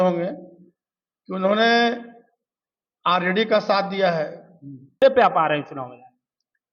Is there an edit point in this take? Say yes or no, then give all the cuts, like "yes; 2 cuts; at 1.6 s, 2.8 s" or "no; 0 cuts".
yes; 1 cut; at 5.0 s